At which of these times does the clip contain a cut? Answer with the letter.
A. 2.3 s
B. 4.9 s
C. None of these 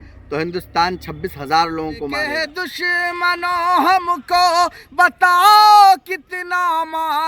A